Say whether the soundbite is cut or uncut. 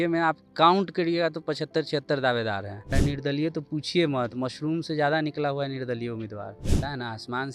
cut